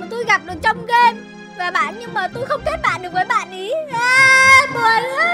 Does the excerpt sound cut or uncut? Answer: uncut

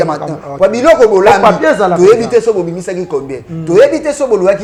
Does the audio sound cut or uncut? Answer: uncut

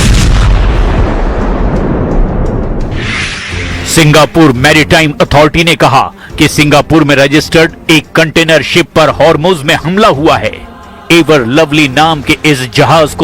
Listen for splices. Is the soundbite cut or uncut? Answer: cut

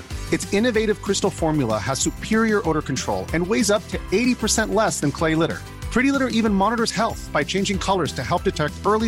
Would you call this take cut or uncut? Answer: uncut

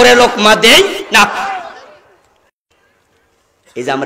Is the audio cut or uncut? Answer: uncut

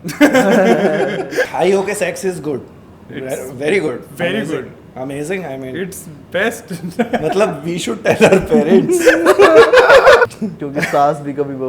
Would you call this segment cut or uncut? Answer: cut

